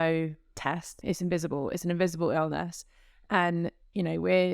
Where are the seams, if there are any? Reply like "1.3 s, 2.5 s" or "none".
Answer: 1.0 s